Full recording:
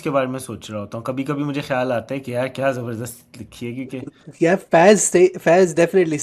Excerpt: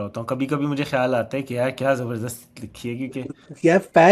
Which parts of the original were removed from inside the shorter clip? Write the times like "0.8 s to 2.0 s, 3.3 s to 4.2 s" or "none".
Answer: none

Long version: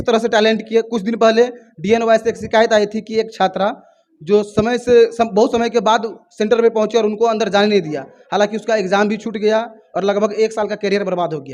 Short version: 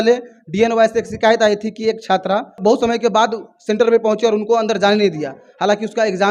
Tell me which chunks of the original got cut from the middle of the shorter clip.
3.9 s to 5.3 s

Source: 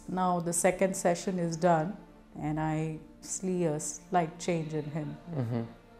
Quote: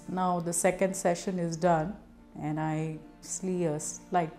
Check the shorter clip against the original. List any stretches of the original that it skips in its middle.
none

